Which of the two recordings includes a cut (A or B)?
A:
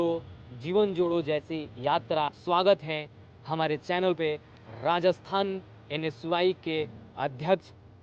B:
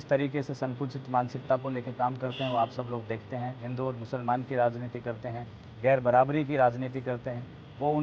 A